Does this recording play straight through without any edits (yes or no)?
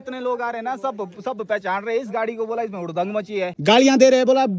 no